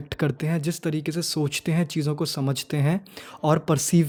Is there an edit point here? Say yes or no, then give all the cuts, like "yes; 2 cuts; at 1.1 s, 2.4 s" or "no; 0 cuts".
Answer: no; 0 cuts